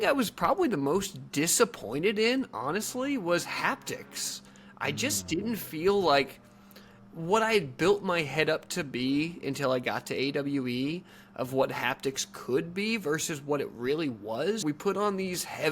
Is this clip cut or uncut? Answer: cut